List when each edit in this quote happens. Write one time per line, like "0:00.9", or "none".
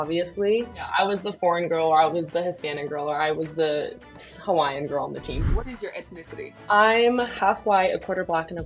0:00.9
0:05.4